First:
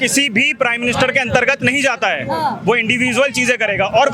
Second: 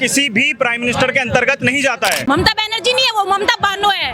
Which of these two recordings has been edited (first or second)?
second